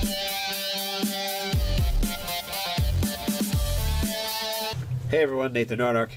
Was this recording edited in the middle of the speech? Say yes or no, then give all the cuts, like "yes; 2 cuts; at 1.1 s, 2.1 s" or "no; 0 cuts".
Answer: no; 0 cuts